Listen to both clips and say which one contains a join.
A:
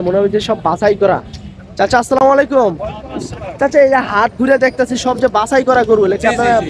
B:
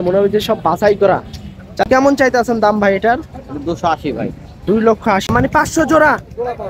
B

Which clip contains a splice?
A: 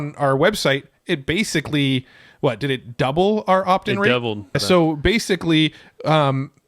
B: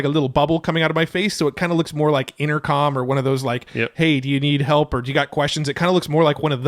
A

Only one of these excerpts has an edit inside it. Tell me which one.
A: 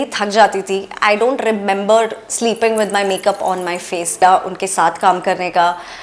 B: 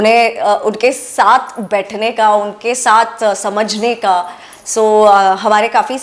A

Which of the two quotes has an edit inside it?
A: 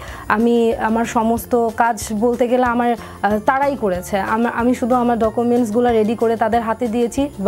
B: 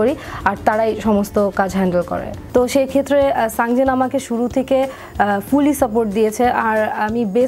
B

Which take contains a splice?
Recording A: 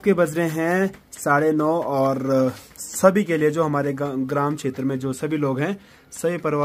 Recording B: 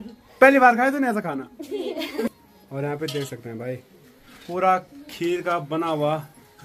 B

